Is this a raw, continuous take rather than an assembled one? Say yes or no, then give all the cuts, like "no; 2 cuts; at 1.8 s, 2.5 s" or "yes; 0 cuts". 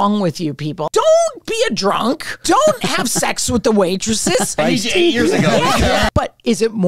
no; 4 cuts; at 0.8 s, 2.3 s, 4.6 s, 6.1 s